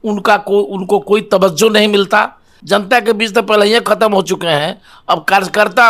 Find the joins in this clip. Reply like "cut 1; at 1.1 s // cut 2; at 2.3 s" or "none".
cut 1; at 2.6 s